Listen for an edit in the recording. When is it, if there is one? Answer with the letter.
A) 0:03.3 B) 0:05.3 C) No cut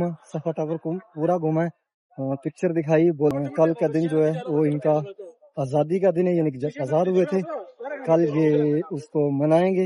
A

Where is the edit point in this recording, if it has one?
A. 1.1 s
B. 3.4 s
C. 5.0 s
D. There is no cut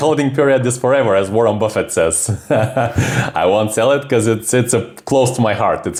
D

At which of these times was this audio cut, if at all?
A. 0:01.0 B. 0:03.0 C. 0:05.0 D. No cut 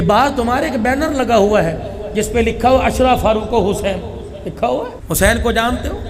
C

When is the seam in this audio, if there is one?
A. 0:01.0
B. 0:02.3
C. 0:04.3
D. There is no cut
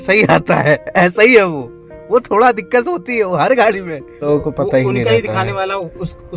C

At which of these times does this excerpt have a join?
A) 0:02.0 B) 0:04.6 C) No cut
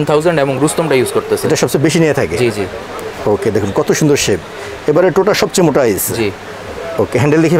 C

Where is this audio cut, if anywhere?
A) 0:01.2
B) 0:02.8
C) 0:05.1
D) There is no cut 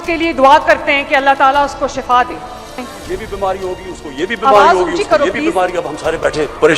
B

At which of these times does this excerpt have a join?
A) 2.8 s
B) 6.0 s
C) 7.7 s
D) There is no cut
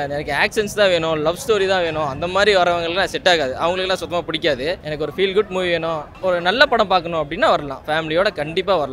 D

